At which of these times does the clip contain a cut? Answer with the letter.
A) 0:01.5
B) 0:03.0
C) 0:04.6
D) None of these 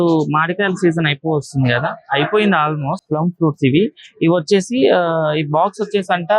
B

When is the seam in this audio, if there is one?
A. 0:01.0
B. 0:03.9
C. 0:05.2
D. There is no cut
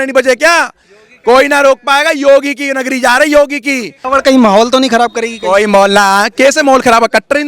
B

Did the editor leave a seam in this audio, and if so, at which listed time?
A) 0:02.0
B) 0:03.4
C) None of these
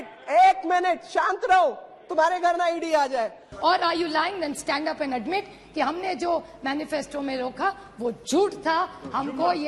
B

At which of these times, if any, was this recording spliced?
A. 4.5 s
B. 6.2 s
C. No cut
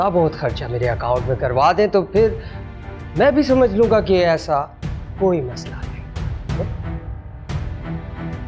C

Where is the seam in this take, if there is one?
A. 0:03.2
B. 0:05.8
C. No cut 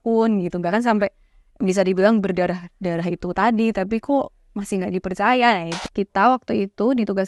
B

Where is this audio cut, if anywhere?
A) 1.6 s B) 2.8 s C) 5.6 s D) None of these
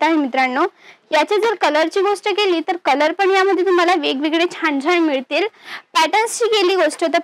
D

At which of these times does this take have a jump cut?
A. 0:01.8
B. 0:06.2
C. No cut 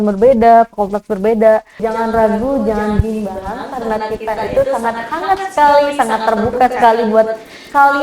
A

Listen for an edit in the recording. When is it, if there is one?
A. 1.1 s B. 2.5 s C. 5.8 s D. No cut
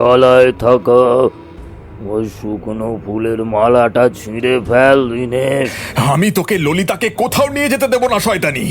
C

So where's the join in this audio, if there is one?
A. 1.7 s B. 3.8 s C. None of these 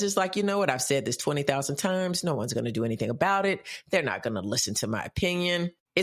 C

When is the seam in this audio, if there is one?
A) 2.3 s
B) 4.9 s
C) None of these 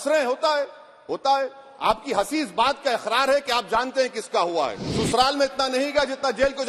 B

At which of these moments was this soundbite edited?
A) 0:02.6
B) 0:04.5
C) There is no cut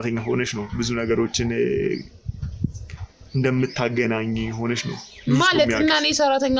C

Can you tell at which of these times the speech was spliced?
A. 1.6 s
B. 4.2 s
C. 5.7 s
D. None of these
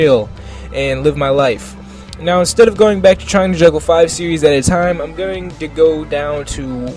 B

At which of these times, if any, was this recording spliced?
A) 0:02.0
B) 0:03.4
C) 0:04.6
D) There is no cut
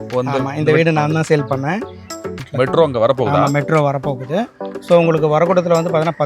A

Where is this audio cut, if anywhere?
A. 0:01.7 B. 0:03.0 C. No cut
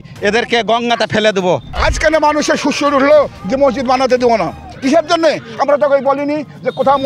A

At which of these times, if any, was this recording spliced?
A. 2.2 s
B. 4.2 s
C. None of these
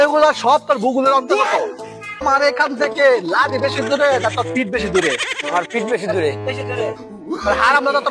A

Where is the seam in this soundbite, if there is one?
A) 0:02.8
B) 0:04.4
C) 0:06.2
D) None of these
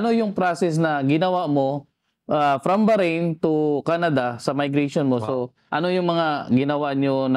D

